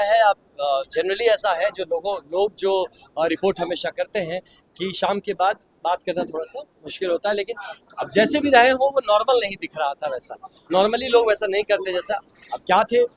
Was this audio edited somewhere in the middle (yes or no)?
no